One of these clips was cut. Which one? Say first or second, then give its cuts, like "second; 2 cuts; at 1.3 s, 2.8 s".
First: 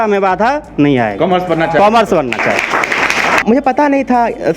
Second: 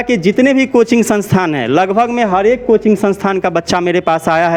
first; 1 cut; at 3.4 s